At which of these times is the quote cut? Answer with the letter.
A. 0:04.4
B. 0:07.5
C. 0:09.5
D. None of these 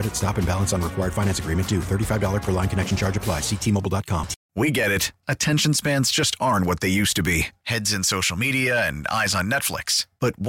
A